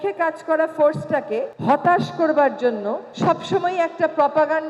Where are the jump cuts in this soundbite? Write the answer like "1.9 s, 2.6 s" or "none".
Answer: 1.5 s, 3.0 s

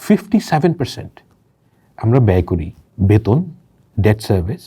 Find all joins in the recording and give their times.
2.8 s

